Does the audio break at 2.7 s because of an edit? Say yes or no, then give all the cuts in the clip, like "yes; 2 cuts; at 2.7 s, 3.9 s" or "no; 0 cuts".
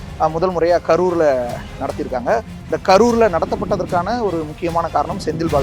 no; 0 cuts